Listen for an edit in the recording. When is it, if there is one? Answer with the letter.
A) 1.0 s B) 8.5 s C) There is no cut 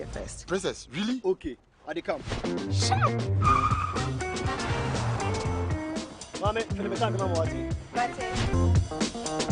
B